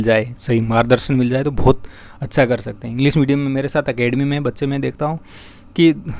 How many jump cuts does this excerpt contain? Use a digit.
0